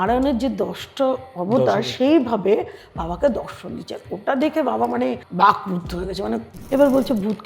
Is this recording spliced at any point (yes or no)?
yes